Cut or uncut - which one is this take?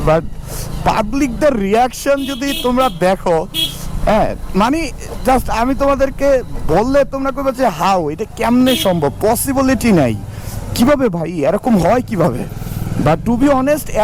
uncut